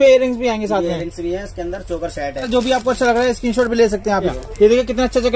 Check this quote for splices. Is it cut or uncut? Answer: cut